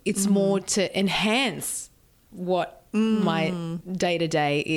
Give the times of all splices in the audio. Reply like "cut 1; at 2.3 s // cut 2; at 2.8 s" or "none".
cut 1; at 3.8 s